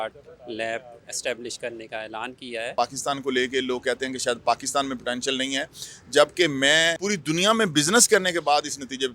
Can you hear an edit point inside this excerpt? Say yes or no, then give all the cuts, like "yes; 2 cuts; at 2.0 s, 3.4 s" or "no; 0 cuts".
yes; 2 cuts; at 2.7 s, 7.0 s